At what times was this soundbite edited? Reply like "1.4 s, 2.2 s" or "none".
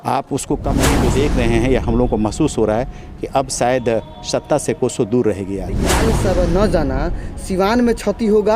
0.9 s, 5.9 s

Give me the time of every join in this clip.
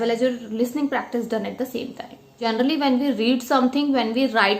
2.5 s

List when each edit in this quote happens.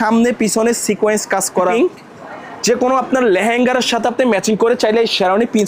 1.7 s

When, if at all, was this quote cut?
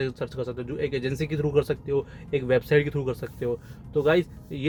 none

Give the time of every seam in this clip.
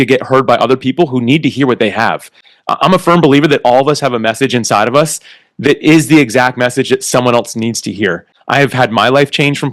8.3 s

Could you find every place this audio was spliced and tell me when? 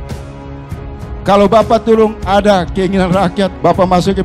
0.9 s

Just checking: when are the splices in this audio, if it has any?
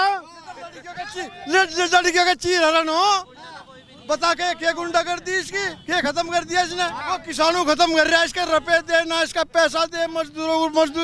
7.0 s

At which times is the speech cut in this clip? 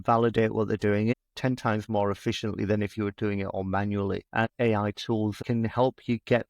1.1 s, 4.3 s, 5.4 s

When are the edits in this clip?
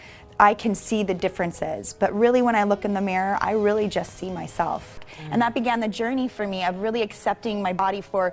5.0 s

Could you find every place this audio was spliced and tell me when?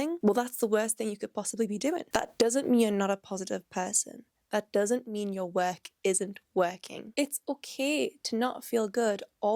2.1 s, 7.0 s

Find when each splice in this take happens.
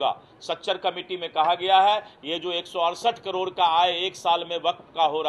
none

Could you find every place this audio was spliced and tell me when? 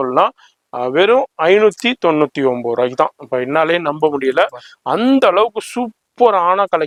none

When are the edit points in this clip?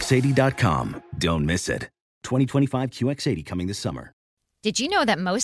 4.3 s

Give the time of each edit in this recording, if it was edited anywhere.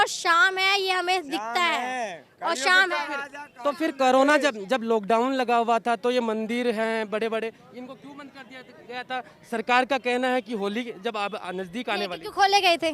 none

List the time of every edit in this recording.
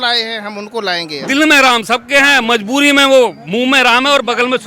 1.1 s

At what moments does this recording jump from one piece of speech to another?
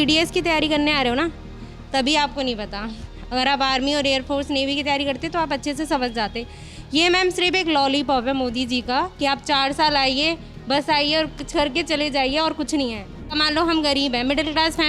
13.3 s

